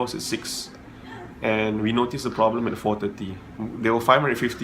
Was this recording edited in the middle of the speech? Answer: yes; 1 cut; at 3.6 s

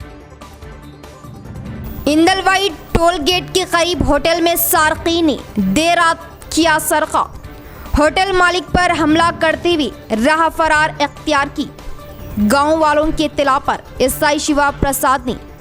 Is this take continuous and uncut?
no; 1 cut; at 1.8 s

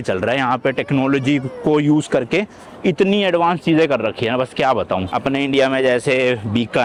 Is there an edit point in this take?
no; 0 cuts

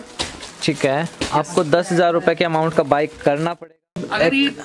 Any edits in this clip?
yes; 1 cut; at 3.6 s

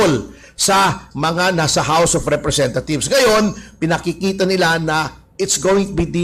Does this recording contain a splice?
no; 0 cuts

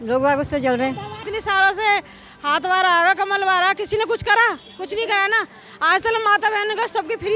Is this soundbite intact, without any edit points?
no; 1 cut; at 1.2 s

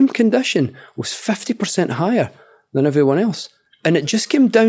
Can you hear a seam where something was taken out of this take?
yes; 1 cut; at 3.7 s

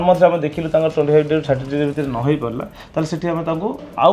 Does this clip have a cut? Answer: no; 0 cuts

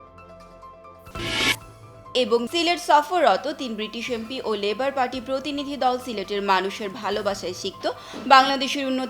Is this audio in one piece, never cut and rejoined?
no; 1 cut; at 1.0 s

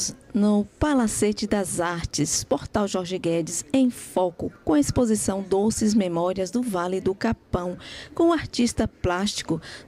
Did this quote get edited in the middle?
no; 0 cuts

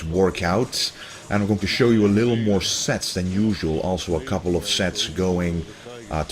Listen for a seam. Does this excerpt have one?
yes; 1 cut; at 2.9 s

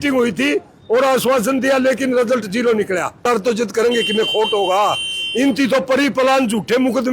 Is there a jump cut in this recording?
yes; 1 cut; at 3.1 s

